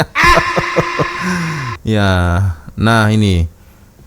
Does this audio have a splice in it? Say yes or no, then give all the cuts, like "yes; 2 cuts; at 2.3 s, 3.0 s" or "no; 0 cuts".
no; 0 cuts